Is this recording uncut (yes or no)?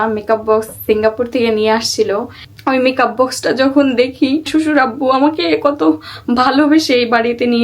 no